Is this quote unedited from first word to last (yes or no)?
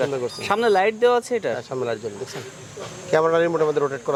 yes